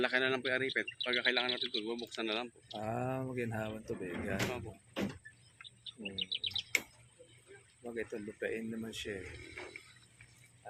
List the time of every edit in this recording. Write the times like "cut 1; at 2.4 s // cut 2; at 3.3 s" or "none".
none